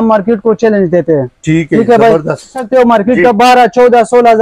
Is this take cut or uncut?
cut